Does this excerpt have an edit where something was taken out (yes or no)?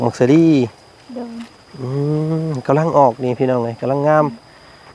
no